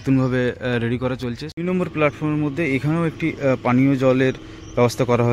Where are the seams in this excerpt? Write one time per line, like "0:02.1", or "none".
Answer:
0:01.5